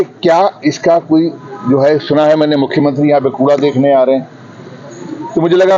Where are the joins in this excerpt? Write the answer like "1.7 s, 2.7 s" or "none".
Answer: none